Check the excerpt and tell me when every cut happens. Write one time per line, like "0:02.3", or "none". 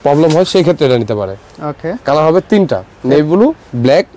none